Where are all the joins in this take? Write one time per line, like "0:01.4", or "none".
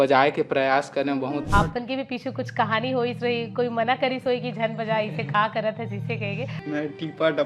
0:01.4
0:06.5